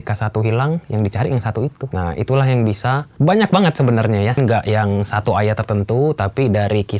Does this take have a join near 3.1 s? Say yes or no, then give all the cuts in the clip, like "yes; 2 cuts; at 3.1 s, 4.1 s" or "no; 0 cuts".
yes; 3 cuts; at 1.8 s, 3.1 s, 4.4 s